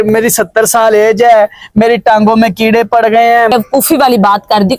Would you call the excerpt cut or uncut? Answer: cut